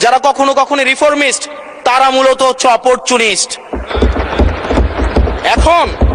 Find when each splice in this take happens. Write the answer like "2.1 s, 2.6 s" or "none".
none